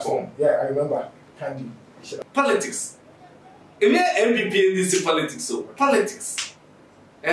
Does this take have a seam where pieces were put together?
yes; 1 cut; at 2.1 s

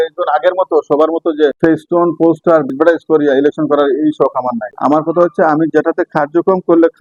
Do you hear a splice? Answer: no; 0 cuts

